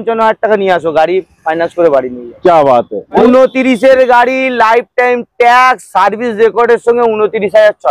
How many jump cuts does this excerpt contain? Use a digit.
1